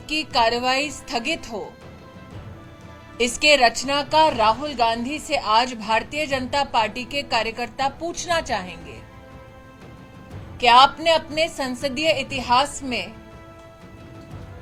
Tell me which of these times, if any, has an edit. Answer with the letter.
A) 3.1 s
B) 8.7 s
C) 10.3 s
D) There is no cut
D